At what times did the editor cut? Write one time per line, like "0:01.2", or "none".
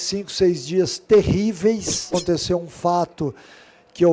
0:02.1